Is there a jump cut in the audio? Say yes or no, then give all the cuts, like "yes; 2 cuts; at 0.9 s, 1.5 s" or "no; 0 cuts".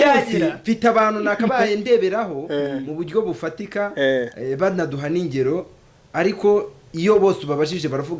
no; 0 cuts